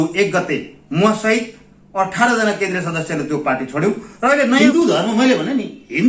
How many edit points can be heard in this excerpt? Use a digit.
1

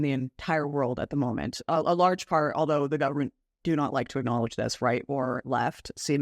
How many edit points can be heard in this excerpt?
1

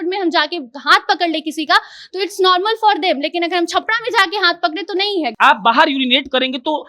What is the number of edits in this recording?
1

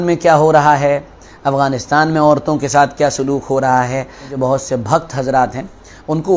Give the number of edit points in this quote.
1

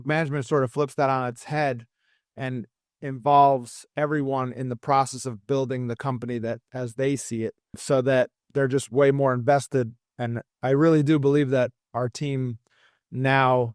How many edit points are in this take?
2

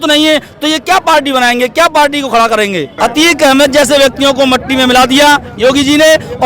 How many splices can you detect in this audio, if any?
1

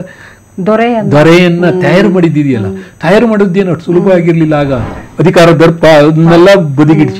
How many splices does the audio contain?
1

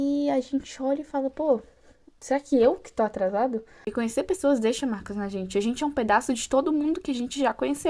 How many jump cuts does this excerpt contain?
1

